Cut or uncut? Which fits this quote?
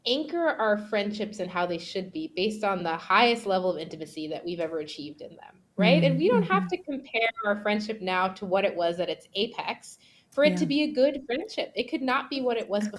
uncut